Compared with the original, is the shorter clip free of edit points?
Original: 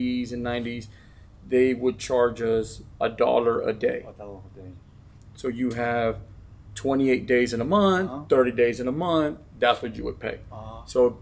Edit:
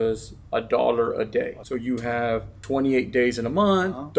no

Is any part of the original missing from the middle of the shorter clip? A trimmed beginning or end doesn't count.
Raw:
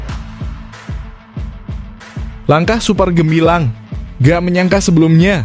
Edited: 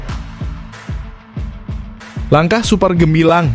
yes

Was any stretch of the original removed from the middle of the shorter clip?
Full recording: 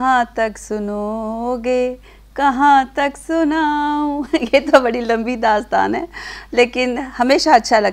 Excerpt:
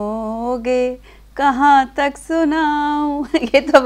no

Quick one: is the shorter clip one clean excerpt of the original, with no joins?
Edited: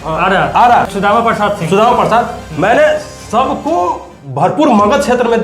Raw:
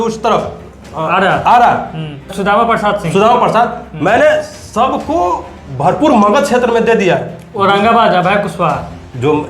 no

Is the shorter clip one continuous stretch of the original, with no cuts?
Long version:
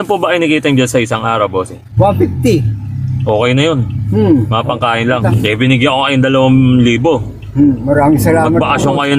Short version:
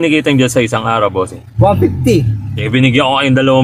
no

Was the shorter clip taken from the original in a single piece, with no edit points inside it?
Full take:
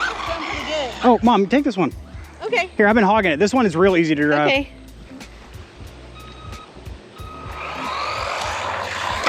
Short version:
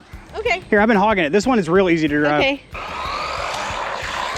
no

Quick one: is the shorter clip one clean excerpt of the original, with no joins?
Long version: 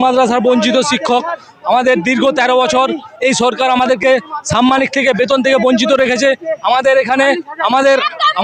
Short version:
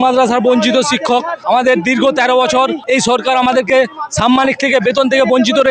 no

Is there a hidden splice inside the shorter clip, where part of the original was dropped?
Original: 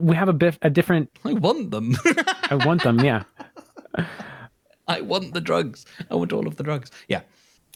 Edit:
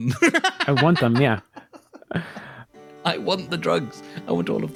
no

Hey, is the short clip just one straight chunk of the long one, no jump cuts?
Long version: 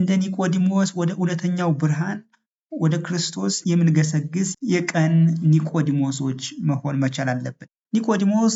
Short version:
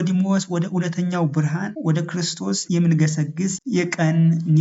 no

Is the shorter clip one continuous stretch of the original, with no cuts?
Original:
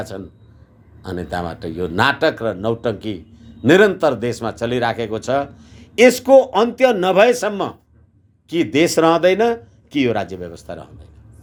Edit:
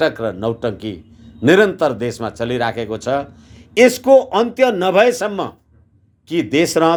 yes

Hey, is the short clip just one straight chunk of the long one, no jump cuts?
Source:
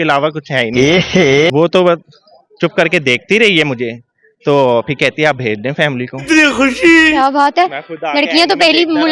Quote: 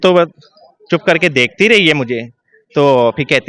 yes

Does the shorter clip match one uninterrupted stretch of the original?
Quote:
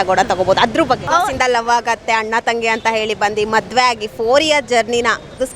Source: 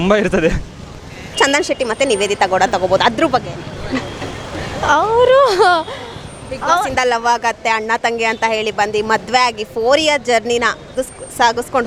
no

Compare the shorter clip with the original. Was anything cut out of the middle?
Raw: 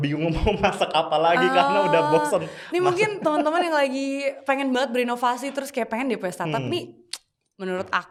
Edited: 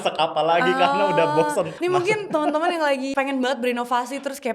yes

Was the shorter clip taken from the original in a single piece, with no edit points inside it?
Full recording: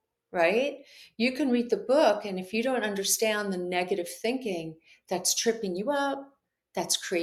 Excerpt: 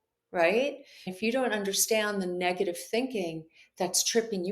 no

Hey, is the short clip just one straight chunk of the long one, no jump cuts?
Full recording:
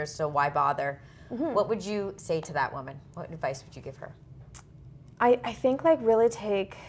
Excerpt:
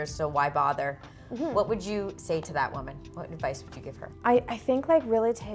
no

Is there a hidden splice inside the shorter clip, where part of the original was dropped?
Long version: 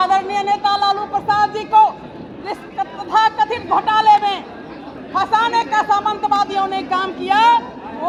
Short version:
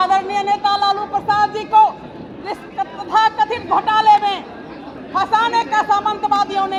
no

